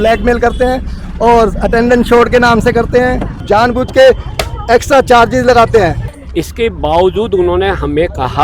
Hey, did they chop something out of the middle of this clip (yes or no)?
yes